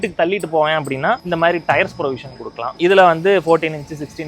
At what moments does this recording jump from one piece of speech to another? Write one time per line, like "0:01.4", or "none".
0:02.7

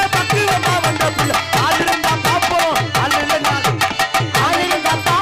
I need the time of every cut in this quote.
none

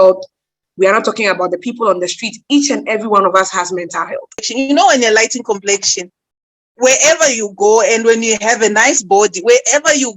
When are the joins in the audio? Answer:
0:04.5

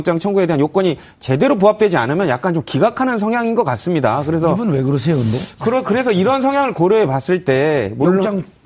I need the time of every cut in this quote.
0:07.4

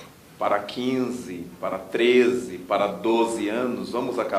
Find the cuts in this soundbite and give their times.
0:01.5

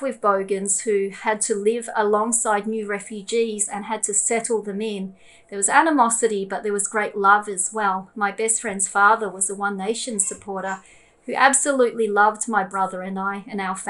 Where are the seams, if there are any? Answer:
none

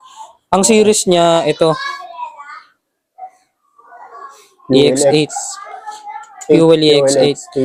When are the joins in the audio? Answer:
none

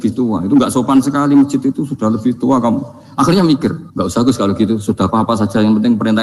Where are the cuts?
0:03.9

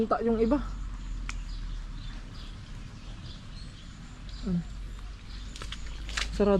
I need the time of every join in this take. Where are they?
none

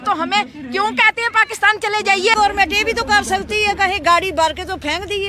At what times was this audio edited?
0:02.3

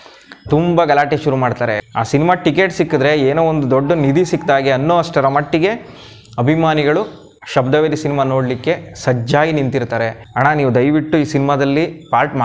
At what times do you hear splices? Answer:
0:01.8
0:10.2

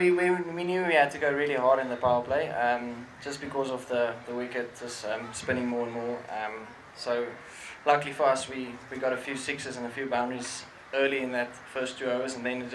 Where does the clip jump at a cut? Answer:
none

